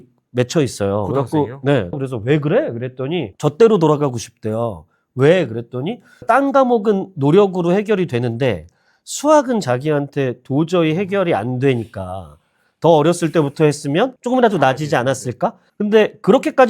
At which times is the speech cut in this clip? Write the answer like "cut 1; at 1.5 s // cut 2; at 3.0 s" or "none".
cut 1; at 1.9 s // cut 2; at 3.3 s // cut 3; at 15.6 s